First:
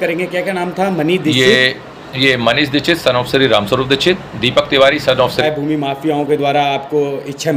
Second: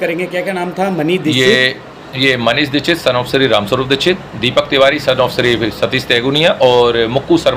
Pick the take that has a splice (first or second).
first